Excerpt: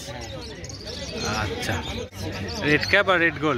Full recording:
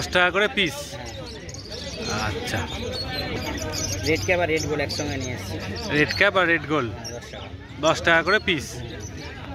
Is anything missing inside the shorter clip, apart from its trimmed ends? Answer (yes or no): yes